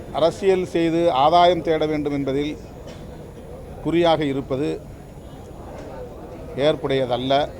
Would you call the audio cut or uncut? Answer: uncut